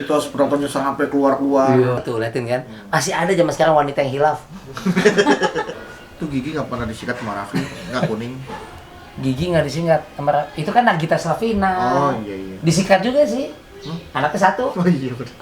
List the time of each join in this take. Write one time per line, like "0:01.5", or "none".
0:02.0
0:05.7